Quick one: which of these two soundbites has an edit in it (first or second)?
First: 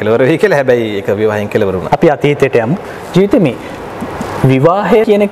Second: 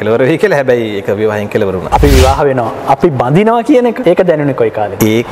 second